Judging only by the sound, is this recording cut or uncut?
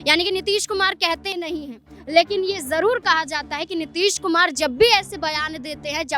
cut